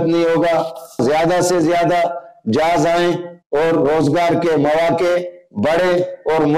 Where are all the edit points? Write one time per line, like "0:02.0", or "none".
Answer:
0:01.0